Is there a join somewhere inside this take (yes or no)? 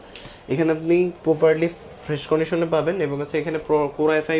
no